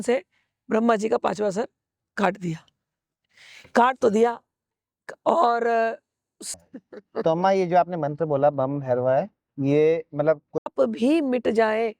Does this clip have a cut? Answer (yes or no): yes